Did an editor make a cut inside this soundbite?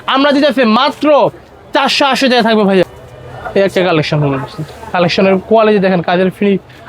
yes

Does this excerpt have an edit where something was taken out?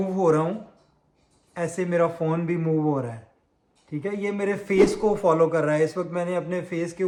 no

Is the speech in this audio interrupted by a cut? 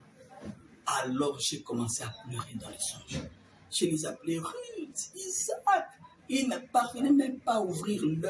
no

